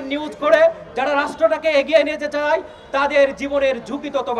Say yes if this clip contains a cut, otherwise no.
no